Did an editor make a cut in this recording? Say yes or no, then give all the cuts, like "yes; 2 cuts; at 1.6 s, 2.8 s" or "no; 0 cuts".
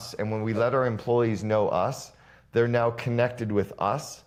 no; 0 cuts